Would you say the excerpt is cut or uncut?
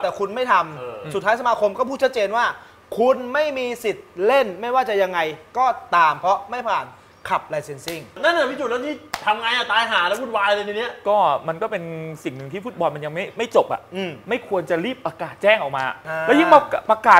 cut